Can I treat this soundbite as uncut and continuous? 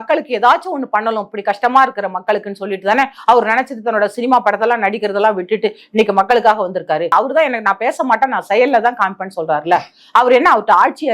no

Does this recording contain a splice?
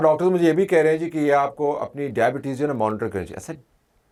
no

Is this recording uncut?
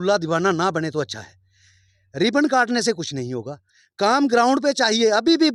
yes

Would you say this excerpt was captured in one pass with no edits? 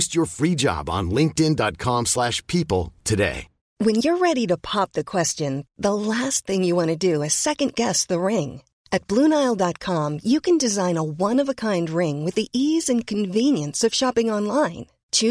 no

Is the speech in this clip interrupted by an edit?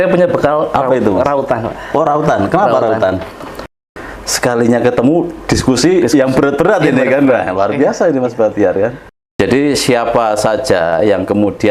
yes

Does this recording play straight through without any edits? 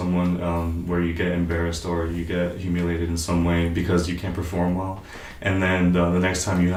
yes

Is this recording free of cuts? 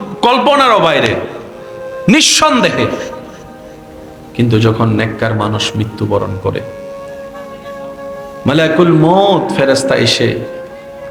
yes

